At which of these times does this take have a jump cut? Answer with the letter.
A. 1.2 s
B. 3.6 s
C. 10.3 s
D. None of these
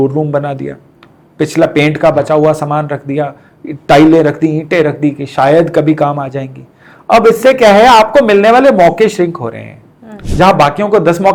D